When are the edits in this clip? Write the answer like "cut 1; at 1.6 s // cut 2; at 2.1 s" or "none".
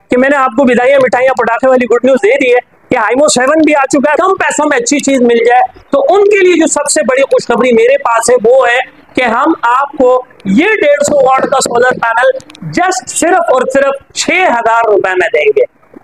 cut 1; at 4.2 s